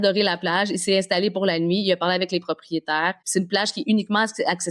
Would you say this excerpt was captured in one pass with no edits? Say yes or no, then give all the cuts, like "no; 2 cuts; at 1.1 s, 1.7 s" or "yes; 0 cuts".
no; 1 cut; at 3.2 s